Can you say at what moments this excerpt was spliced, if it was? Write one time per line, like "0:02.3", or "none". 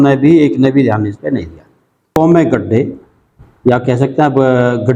0:02.1